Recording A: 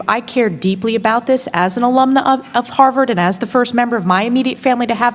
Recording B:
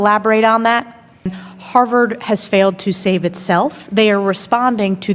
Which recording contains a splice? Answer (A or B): B